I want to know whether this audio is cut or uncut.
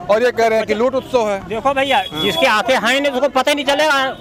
uncut